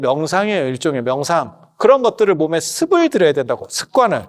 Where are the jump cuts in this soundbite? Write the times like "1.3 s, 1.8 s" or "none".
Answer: 1.7 s